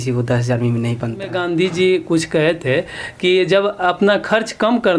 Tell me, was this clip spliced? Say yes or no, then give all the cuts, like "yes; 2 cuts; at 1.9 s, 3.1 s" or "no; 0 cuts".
yes; 1 cut; at 1.4 s